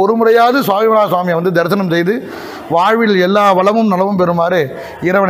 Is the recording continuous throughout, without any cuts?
yes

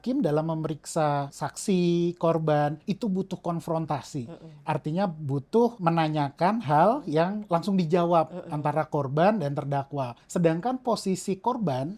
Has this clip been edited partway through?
yes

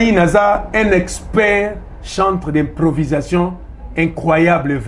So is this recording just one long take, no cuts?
yes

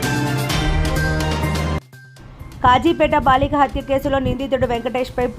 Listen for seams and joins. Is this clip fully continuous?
no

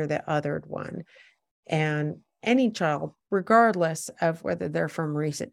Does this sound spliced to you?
no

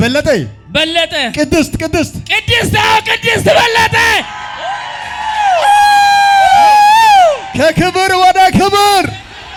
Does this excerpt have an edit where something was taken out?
no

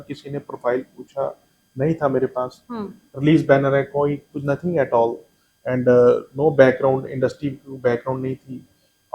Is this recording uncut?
yes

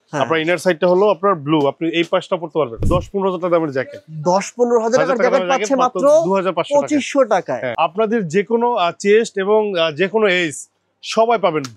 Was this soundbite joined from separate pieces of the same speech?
yes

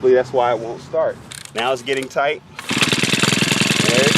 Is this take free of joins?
no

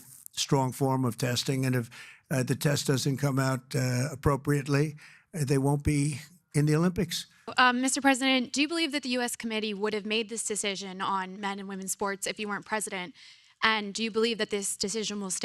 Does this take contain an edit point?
yes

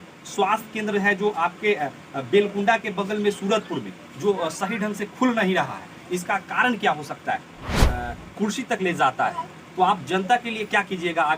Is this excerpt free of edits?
no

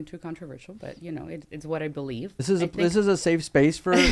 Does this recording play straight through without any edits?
no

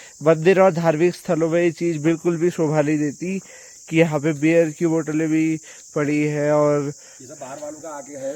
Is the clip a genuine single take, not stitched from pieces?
yes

